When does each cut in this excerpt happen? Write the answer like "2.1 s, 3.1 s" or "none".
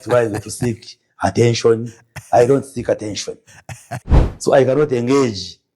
3.9 s